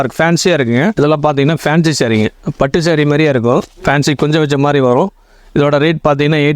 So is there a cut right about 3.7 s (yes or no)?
yes